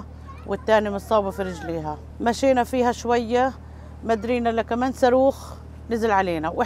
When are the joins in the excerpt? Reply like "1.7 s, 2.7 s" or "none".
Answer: 2.0 s